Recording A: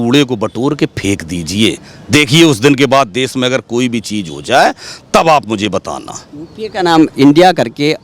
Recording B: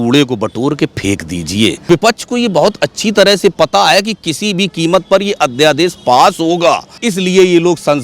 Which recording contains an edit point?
B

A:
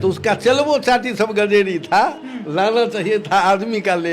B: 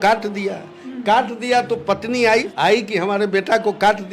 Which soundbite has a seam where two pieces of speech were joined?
B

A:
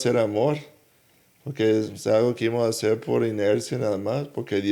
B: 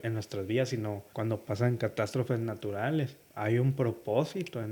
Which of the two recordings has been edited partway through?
B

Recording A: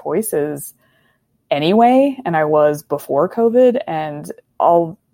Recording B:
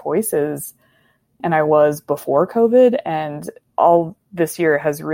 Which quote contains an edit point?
B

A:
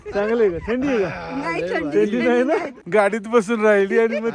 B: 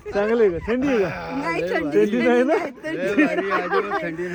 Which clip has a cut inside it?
A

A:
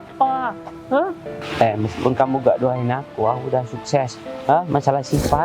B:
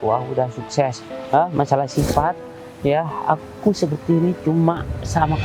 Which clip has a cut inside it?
A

